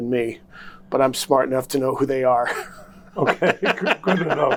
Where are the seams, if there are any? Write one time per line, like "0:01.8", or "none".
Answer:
none